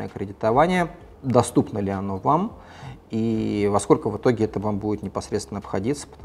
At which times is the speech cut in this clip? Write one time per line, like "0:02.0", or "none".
none